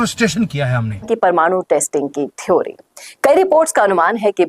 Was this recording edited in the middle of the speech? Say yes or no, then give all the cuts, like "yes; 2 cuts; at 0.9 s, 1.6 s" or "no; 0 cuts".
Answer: yes; 1 cut; at 1.0 s